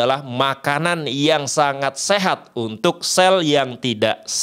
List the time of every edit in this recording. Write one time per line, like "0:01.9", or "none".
none